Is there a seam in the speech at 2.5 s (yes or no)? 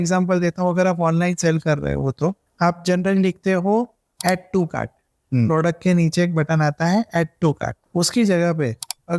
yes